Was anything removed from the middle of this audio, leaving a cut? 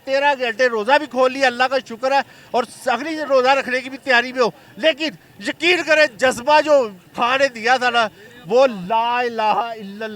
no; 0 cuts

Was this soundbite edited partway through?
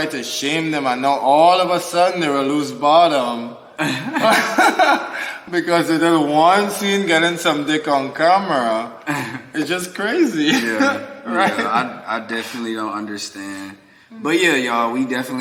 no; 0 cuts

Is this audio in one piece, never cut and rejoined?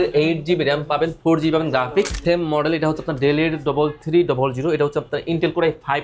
no; 1 cut; at 2.2 s

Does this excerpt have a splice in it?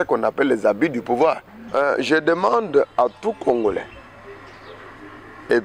yes; 1 cut; at 1.6 s

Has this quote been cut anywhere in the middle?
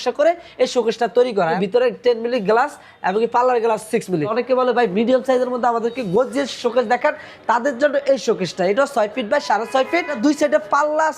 yes; 3 cuts; at 1.6 s, 4.3 s, 10.1 s

